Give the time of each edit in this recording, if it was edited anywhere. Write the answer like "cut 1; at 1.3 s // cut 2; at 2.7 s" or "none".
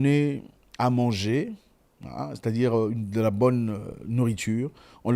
none

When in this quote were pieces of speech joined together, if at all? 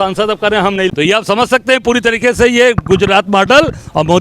cut 1; at 0.9 s

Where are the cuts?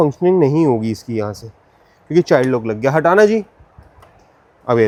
none

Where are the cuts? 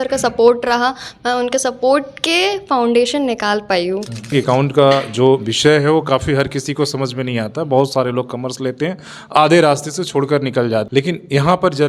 cut 1; at 4.3 s // cut 2; at 10.9 s

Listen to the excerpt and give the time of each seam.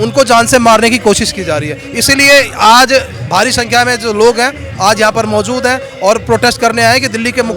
none

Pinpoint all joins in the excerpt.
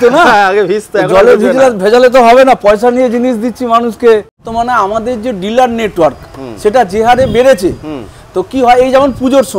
cut 1; at 4.3 s

